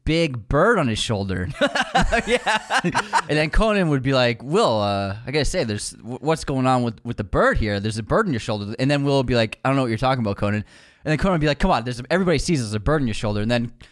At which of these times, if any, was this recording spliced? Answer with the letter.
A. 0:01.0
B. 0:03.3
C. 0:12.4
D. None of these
B